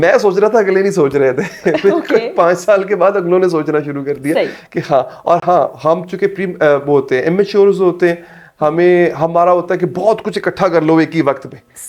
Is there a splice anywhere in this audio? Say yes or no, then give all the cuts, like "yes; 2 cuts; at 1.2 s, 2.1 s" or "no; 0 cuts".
no; 0 cuts